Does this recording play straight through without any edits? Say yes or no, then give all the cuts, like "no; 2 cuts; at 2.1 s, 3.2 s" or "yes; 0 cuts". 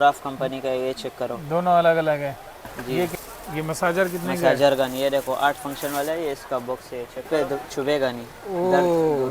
no; 2 cuts; at 3.2 s, 7.3 s